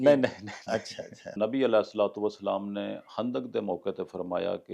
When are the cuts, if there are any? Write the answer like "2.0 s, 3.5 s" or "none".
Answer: 1.3 s